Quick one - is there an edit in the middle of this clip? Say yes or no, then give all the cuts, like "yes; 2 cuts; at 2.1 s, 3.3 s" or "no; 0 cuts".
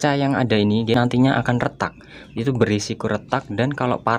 yes; 1 cut; at 0.9 s